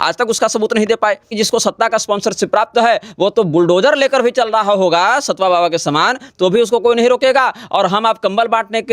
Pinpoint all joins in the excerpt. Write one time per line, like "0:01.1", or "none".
0:01.3